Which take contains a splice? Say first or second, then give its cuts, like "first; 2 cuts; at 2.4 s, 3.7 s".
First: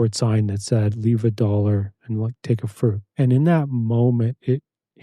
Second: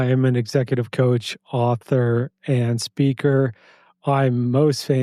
first; 1 cut; at 3.0 s